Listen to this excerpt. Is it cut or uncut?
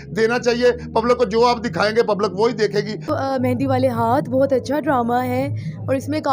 cut